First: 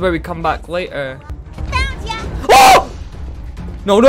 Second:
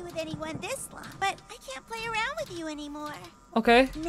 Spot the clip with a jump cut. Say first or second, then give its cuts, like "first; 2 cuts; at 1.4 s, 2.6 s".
second; 1 cut; at 1.0 s